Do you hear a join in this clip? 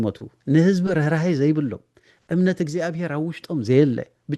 no; 0 cuts

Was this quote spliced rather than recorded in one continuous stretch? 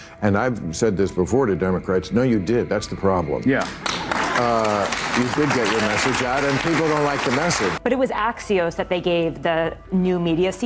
yes; 1 cut; at 7.8 s

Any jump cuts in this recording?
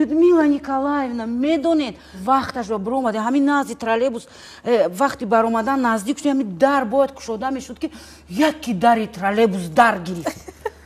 no; 0 cuts

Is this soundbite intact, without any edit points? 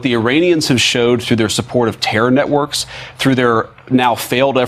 yes; 0 cuts

